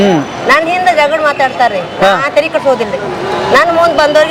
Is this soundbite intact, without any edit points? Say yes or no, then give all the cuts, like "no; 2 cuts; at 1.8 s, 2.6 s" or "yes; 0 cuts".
yes; 0 cuts